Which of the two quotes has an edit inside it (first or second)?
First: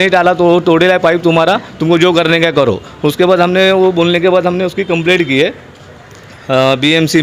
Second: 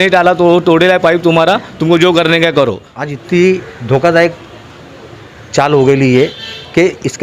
second